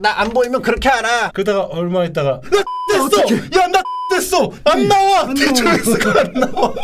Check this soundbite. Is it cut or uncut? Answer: cut